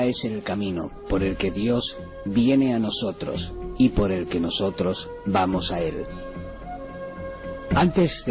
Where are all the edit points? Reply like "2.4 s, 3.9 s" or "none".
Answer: 5.7 s